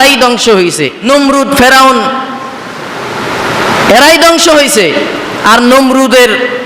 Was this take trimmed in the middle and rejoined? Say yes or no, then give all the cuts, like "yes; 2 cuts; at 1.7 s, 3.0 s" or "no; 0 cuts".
yes; 1 cut; at 1.1 s